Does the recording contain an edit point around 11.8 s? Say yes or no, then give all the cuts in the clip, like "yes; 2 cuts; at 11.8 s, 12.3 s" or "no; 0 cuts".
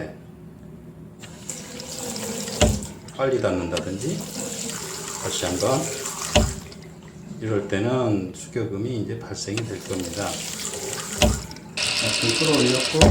yes; 1 cut; at 11.8 s